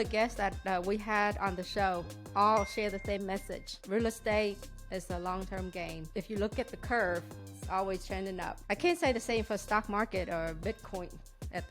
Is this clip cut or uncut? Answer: cut